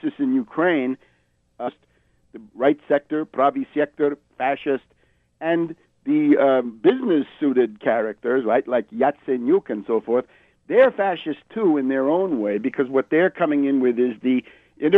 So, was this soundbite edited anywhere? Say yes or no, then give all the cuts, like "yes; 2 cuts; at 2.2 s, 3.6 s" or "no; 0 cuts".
no; 0 cuts